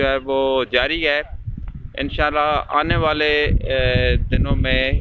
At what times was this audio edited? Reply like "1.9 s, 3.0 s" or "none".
none

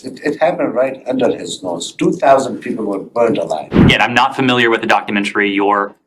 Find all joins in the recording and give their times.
3.8 s

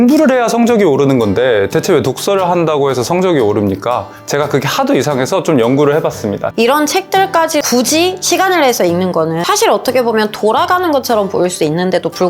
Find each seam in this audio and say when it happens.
6.5 s, 7.7 s, 9.4 s

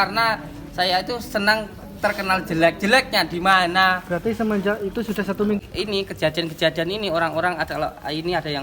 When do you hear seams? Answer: 5.6 s

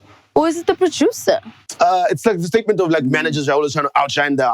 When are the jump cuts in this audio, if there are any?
1.6 s

